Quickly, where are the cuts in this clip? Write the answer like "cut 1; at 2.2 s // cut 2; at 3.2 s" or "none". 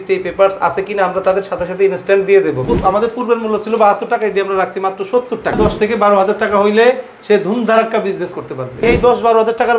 cut 1; at 2.7 s // cut 2; at 5.6 s // cut 3; at 8.8 s